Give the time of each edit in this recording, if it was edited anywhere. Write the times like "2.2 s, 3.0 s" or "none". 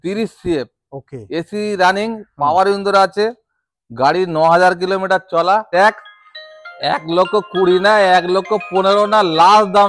5.7 s